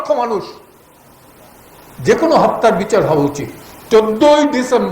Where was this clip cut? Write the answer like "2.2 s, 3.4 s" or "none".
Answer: 3.8 s